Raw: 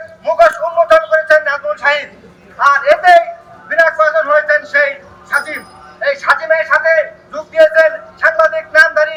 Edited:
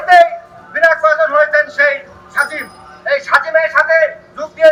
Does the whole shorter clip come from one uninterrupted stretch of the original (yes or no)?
yes